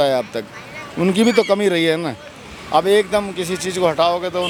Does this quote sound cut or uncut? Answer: uncut